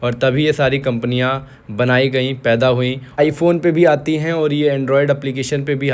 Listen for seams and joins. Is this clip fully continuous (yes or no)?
yes